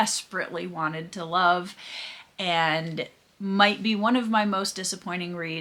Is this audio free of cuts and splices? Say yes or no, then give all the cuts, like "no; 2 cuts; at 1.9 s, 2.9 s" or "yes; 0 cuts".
yes; 0 cuts